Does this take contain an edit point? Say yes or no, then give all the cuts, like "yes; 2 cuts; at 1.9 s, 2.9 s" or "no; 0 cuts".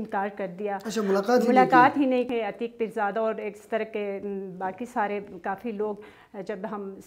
yes; 1 cut; at 2.3 s